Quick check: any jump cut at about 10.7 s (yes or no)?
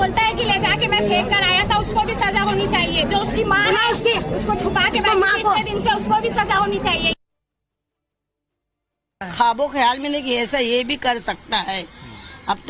yes